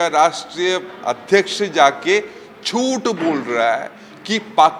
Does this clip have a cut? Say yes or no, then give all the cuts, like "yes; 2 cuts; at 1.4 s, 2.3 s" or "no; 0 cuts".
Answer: no; 0 cuts